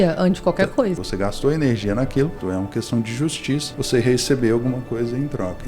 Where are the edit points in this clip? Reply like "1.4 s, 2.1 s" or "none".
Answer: 1.0 s, 2.4 s, 3.7 s